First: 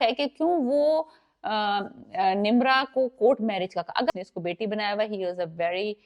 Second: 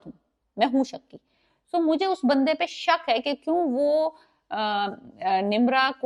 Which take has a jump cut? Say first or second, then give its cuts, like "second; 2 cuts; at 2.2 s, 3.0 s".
first; 1 cut; at 4.1 s